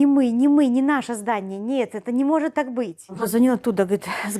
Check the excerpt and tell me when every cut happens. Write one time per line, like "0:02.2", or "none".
0:03.2